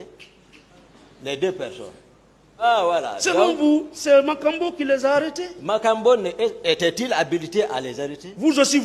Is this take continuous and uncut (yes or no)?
no